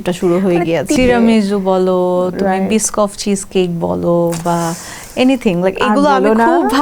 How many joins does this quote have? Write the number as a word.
one